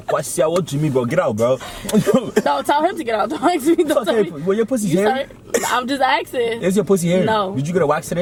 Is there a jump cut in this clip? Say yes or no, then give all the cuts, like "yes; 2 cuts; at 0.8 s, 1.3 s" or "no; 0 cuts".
no; 0 cuts